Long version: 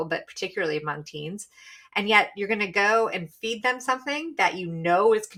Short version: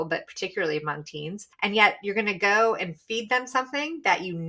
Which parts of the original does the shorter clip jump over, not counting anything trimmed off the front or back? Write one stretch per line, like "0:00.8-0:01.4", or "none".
0:01.4-0:01.8

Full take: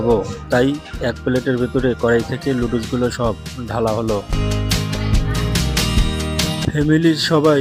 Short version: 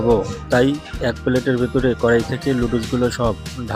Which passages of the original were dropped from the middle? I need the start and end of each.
none

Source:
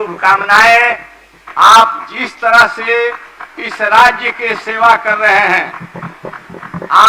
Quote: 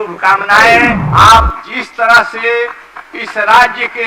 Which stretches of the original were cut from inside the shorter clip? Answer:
0:01.0-0:01.4

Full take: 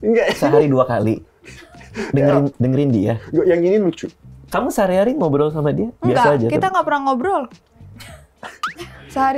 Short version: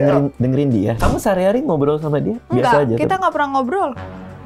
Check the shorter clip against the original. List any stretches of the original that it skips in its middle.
0:03.2-0:04.5

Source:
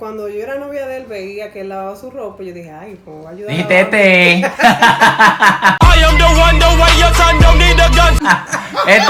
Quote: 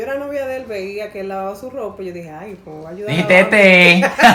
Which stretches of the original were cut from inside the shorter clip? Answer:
none

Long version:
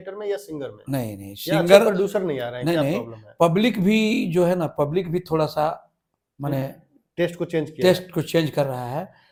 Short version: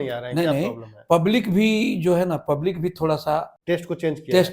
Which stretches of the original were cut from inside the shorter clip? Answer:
0:05.8-0:07.0

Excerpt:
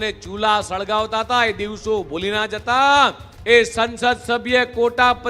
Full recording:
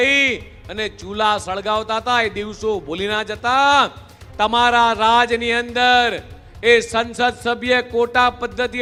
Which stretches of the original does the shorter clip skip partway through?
0:04.0-0:06.4

